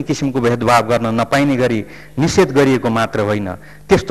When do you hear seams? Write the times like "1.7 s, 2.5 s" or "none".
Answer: none